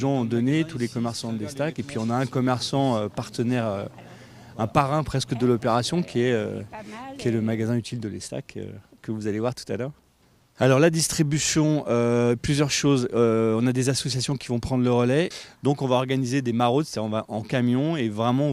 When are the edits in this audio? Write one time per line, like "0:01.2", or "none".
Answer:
0:10.8